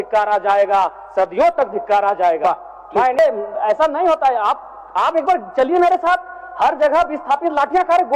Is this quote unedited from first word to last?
no; 1 cut; at 3.2 s

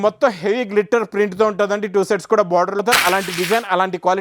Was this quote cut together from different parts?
yes; 1 cut; at 2.8 s

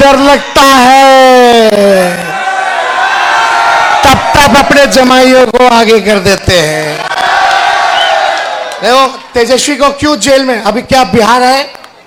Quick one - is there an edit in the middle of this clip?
no; 0 cuts

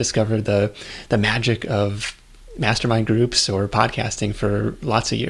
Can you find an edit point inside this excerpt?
no; 0 cuts

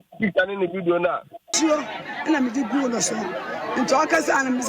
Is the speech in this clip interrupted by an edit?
yes; 1 cut; at 1.5 s

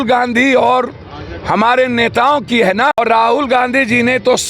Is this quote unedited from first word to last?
no; 1 cut; at 3.0 s

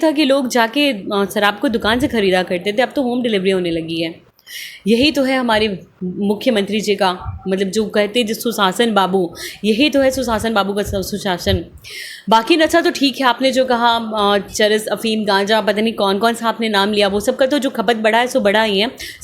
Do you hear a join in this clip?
no; 0 cuts

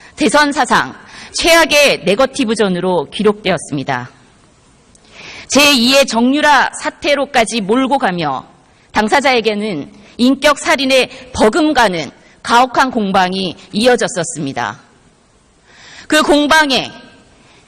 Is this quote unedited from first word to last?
no; 1 cut; at 5.8 s

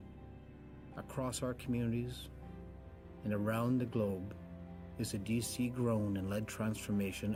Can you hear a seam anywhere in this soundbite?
no; 0 cuts

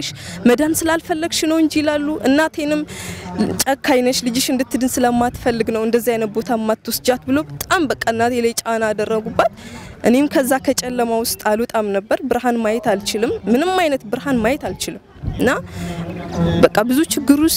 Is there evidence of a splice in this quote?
no; 0 cuts

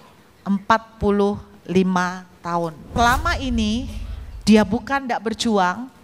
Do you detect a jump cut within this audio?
yes; 1 cut; at 2.9 s

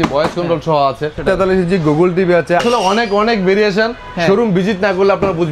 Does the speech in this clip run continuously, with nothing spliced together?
no; 2 cuts; at 1.2 s, 2.6 s

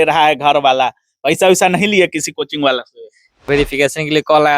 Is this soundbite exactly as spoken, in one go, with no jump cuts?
no; 1 cut; at 3.5 s

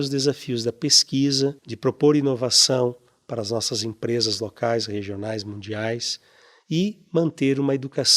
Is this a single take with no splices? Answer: no; 1 cut; at 1.7 s

